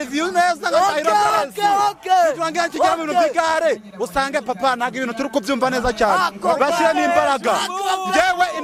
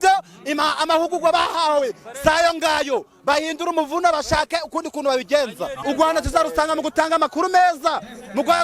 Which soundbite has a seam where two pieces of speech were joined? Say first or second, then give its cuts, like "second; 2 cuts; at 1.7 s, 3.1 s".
second; 1 cut; at 5.8 s